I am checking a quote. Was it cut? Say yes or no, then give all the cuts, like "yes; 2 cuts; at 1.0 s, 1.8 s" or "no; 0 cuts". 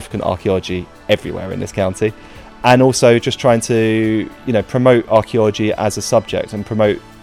no; 0 cuts